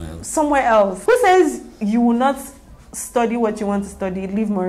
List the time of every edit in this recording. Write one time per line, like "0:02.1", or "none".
0:01.0